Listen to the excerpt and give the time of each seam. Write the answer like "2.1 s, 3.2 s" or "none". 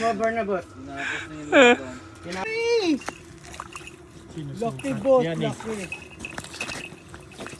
2.5 s